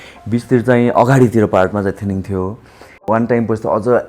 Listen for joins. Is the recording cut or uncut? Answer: cut